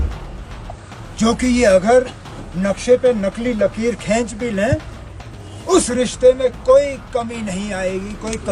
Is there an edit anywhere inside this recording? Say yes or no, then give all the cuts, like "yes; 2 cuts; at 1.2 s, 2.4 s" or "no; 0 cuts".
no; 0 cuts